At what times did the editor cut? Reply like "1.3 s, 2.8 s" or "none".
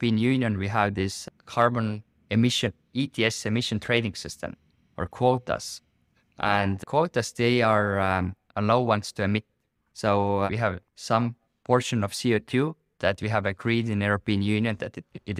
none